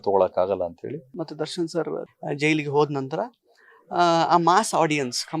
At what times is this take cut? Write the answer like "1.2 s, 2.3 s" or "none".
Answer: 1.1 s